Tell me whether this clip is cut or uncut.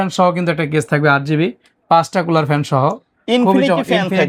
uncut